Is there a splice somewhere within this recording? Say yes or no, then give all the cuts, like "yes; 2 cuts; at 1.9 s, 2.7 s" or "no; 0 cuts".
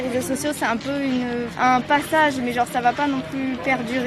yes; 1 cut; at 1.5 s